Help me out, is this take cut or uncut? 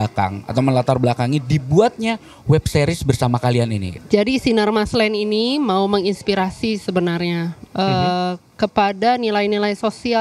cut